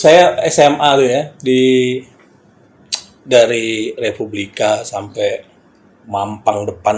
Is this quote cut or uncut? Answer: uncut